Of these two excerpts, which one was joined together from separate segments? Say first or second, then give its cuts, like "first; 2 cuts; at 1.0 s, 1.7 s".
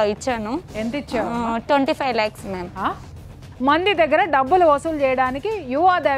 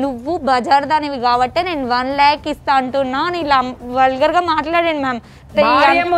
first; 1 cut; at 3.1 s